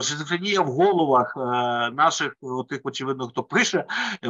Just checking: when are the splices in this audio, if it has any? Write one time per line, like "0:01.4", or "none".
none